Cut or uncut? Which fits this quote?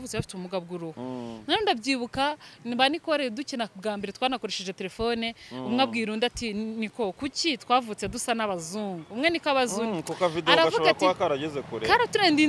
cut